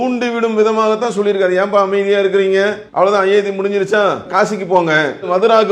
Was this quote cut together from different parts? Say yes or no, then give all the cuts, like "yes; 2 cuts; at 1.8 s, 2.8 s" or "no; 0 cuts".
no; 0 cuts